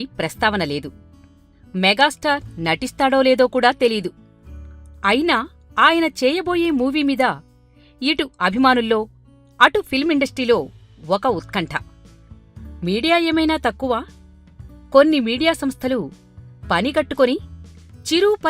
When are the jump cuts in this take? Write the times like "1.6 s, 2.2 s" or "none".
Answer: 11.9 s